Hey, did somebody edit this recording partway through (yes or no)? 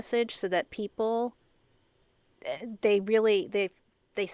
no